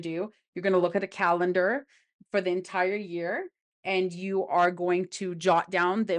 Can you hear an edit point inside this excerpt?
no; 0 cuts

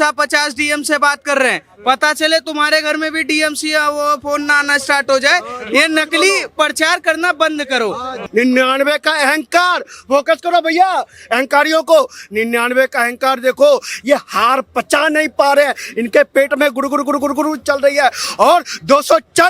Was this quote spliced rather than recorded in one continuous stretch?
yes; 1 cut; at 8.1 s

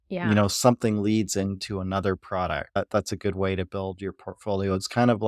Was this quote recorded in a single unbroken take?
no; 1 cut; at 2.8 s

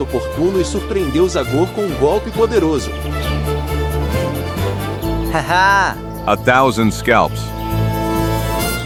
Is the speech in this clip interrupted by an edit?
no; 0 cuts

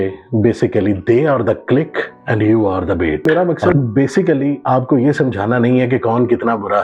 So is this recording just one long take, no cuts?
no; 1 cut; at 3.2 s

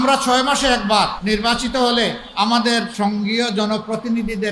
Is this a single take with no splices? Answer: no; 3 cuts; at 1.2 s, 2.2 s, 2.9 s

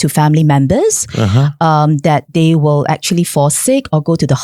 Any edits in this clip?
no; 0 cuts

